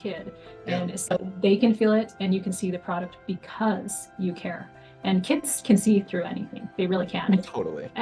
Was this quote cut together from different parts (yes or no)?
no